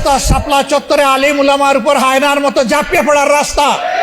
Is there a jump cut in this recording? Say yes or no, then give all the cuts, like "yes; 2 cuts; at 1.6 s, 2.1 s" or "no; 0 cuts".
no; 0 cuts